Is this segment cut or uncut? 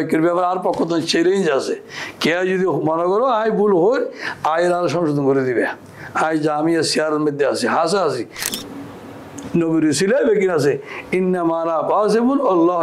cut